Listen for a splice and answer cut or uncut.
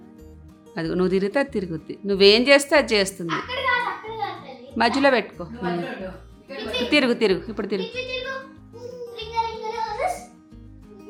uncut